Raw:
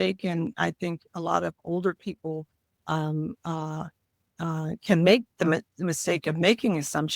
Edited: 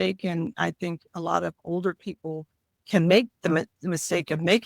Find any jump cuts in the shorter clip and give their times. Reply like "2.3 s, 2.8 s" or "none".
2.8 s

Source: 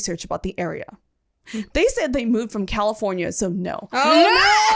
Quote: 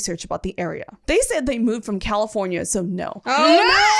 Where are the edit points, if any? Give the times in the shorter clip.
1.0 s

